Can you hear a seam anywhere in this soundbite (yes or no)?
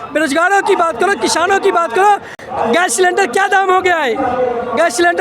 no